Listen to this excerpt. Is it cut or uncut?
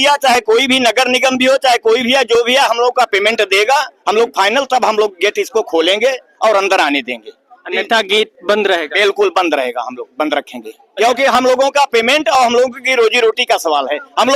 uncut